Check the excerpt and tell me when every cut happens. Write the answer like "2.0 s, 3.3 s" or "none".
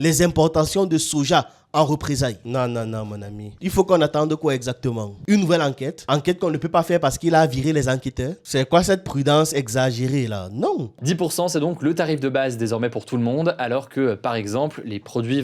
2.4 s, 8.4 s, 11.0 s

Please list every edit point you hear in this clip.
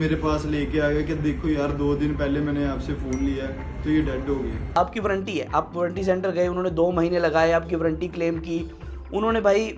4.8 s

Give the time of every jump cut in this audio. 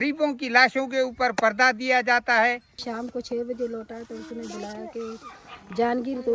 2.9 s

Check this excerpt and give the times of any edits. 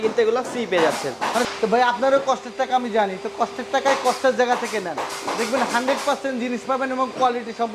1.5 s

